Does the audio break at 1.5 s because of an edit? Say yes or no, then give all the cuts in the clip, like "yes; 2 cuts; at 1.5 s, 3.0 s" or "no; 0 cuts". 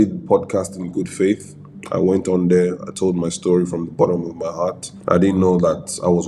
no; 0 cuts